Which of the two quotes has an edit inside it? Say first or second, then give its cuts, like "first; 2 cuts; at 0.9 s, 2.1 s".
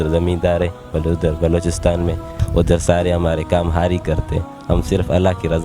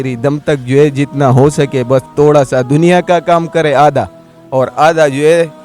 first; 1 cut; at 2.3 s